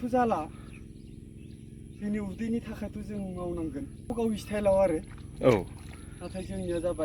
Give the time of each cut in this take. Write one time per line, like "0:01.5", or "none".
0:04.1